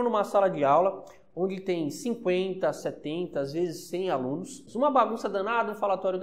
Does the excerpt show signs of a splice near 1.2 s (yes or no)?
no